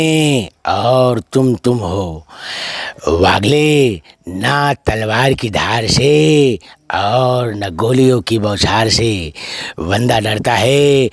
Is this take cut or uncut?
uncut